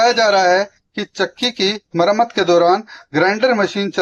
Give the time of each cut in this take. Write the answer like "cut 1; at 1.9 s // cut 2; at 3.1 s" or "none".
none